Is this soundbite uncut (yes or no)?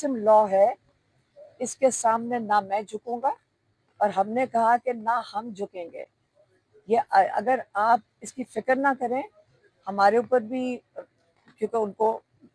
yes